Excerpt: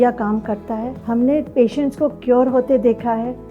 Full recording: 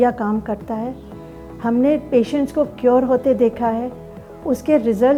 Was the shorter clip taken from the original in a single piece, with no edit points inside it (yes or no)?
no